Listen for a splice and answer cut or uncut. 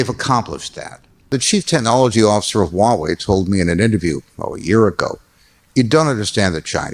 cut